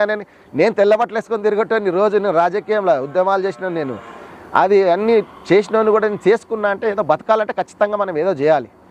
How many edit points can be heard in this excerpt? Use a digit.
0